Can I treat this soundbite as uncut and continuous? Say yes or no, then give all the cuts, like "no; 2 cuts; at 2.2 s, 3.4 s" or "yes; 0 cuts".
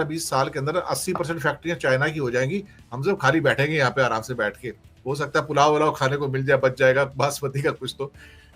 yes; 0 cuts